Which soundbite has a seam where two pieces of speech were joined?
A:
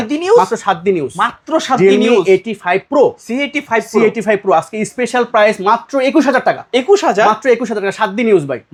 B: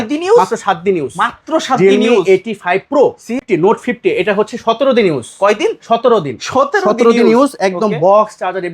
B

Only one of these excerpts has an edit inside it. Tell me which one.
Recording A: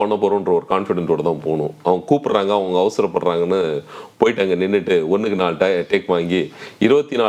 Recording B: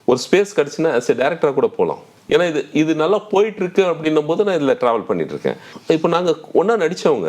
B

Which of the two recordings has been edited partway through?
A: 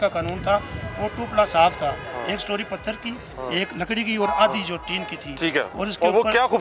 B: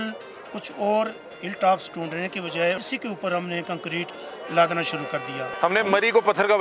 B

